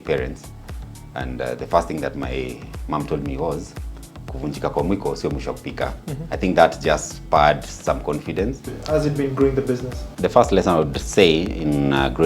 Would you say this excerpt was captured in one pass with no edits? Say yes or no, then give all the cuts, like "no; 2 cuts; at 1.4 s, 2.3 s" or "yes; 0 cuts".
no; 2 cuts; at 8.7 s, 10.0 s